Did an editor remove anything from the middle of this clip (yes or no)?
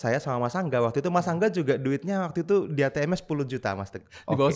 no